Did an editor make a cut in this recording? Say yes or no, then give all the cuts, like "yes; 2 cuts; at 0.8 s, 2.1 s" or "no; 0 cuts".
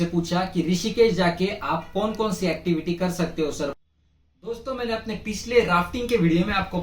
yes; 1 cut; at 3.7 s